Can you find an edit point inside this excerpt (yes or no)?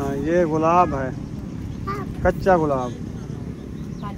no